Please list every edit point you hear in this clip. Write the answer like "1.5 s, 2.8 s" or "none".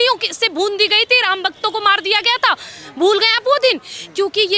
none

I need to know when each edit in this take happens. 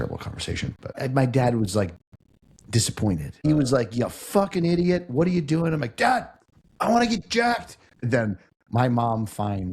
1.0 s, 3.4 s, 8.0 s

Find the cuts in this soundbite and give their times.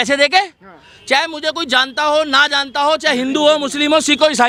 none

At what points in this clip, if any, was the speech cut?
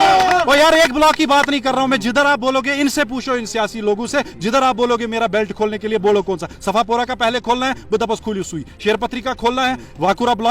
none

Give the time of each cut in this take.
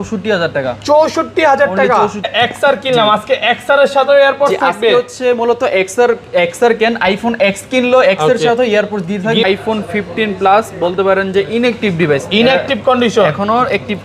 2.3 s, 9.4 s

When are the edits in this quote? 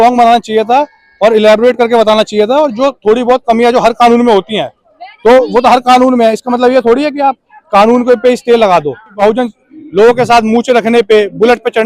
9.1 s

